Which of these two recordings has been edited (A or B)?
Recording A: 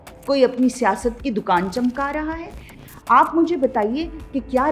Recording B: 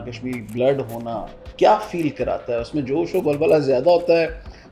A